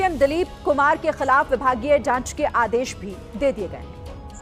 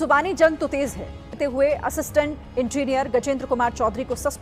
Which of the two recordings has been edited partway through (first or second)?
second